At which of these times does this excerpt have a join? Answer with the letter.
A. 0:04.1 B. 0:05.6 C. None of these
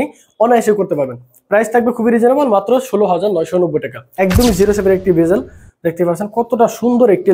A